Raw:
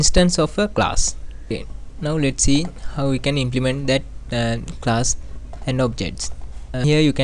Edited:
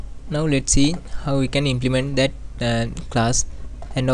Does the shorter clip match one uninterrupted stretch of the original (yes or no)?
yes